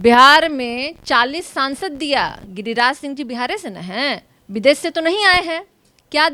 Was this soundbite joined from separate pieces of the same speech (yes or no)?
no